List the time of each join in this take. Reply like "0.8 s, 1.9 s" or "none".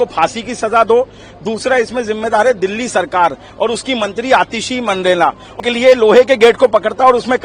5.6 s